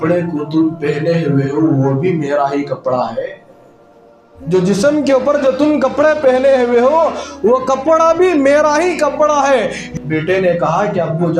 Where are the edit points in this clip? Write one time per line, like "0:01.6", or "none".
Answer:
0:09.9

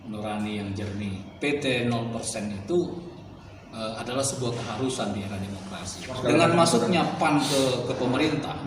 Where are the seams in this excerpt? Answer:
0:01.2
0:06.1

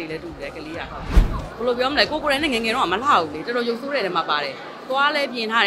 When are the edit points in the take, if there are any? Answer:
none

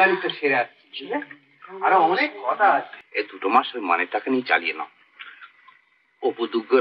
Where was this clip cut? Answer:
0:03.0

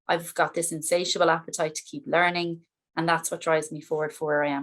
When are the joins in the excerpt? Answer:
none

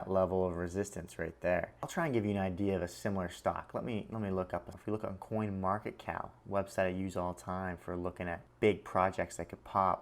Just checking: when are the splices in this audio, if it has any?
0:01.9
0:04.7
0:08.5

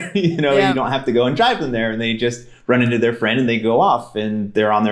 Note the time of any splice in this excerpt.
none

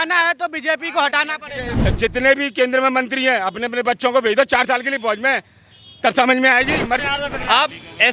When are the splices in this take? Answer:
0:01.7
0:07.0

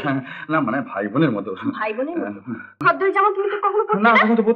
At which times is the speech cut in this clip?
0:02.8

